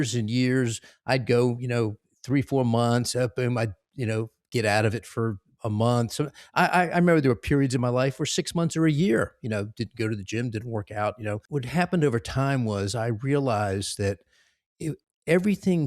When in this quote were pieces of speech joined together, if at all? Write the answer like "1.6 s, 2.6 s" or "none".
11.4 s